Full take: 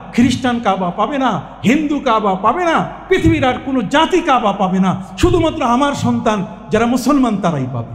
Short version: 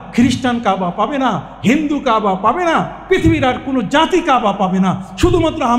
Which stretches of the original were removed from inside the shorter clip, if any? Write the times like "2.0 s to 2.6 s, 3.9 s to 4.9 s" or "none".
none